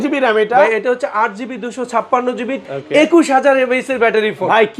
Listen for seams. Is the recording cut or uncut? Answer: cut